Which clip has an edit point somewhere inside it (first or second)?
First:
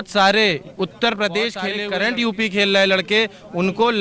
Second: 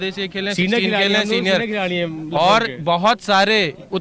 first